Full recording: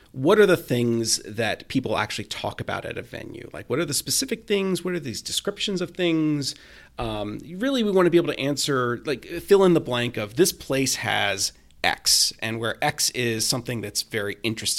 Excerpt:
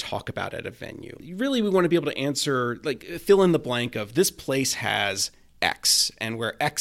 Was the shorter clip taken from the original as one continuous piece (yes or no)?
no